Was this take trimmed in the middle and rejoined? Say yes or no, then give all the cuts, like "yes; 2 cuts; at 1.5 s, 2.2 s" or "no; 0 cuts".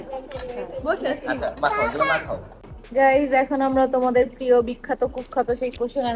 yes; 1 cut; at 2.6 s